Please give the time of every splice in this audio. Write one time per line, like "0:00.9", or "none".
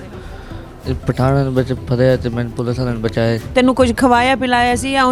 0:03.4